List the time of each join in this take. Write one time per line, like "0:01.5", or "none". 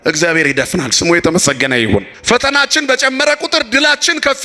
0:02.1

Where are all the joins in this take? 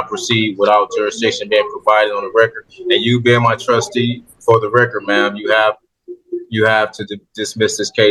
none

